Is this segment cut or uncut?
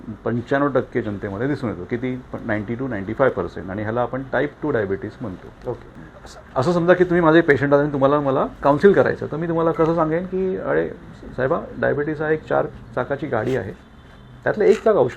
cut